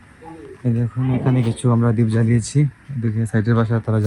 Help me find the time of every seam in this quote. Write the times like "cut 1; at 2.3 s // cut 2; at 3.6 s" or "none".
none